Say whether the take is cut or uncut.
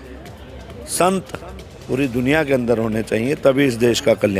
uncut